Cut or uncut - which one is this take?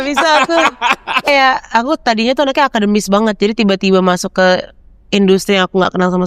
cut